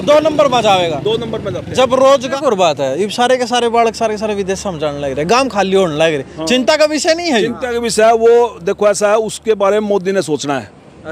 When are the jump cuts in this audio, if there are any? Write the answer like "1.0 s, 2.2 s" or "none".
2.3 s